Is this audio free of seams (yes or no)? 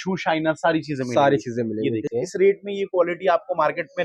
no